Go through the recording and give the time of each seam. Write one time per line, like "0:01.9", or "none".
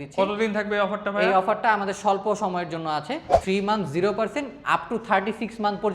0:03.3